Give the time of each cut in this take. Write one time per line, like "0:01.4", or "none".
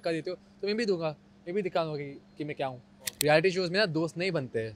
0:03.1